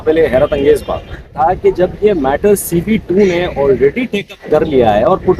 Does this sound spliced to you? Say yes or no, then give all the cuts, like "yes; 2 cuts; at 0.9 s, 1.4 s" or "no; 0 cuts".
yes; 1 cut; at 1.3 s